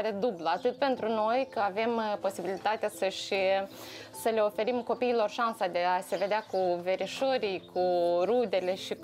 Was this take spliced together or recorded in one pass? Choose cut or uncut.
uncut